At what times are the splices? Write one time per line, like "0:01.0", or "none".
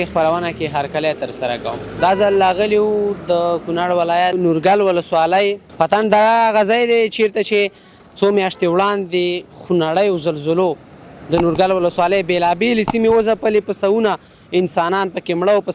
0:04.3
0:05.6